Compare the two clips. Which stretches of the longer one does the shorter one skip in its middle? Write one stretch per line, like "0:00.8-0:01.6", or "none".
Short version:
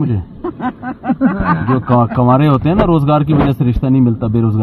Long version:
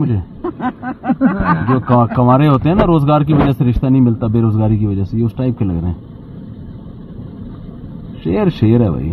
none